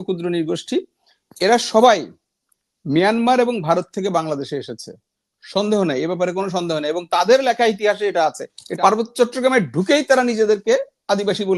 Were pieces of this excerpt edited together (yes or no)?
yes